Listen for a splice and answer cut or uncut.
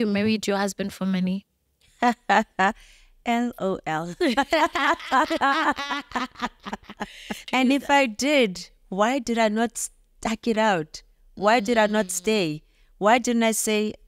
cut